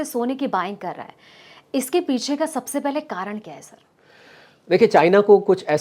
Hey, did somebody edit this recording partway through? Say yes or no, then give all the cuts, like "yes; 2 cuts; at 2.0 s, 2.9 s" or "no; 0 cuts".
no; 0 cuts